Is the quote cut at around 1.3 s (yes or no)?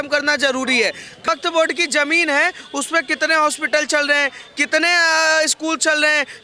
yes